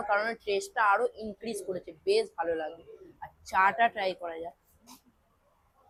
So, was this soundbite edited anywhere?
no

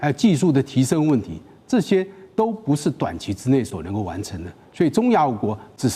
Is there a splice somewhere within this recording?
no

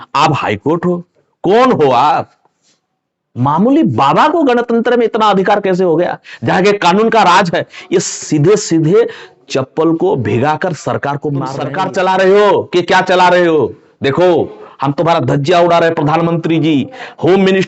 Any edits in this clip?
yes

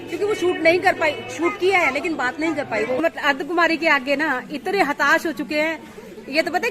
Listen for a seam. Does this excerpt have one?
yes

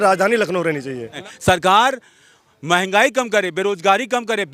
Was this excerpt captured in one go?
no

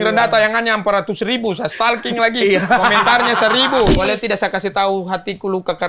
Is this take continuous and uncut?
no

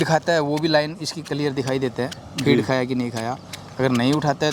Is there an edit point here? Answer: no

